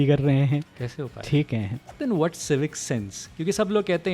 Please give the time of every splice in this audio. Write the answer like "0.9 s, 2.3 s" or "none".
1.8 s